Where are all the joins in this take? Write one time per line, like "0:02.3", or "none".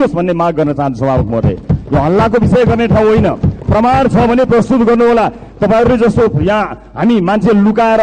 none